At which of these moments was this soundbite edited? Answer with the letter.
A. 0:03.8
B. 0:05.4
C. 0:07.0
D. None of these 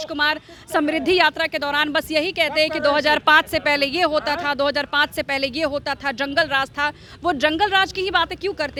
D